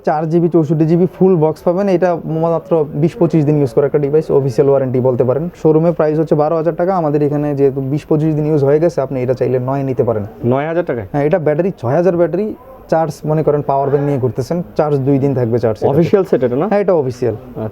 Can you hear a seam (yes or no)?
no